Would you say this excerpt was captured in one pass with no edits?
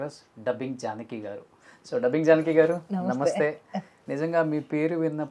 yes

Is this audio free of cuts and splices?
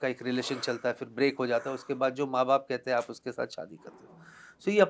yes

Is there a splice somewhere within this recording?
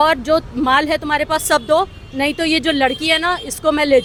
no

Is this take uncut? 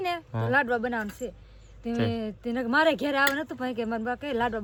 yes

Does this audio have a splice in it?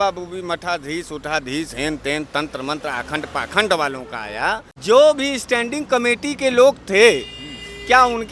yes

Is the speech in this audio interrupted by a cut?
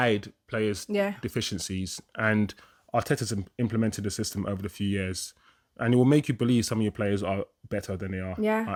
no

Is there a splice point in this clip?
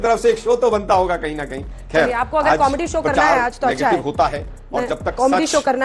no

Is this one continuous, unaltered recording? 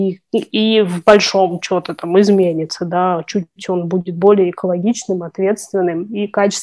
yes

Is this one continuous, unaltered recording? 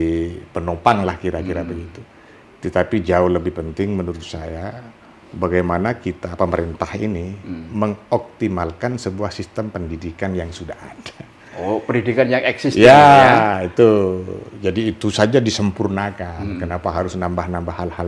yes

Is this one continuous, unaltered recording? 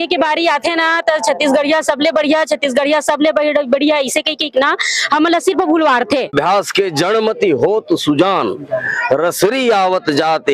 no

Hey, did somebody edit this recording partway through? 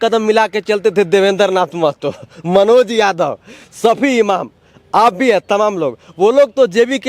no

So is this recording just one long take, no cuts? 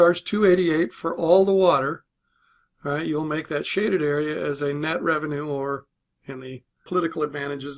yes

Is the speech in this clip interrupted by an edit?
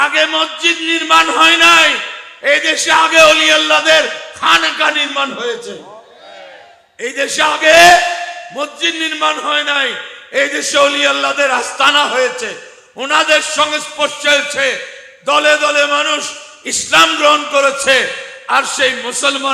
no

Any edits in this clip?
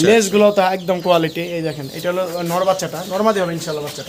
no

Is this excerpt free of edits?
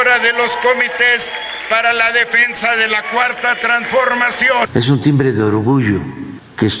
no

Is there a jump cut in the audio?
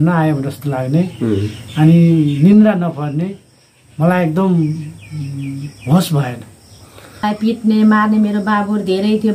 yes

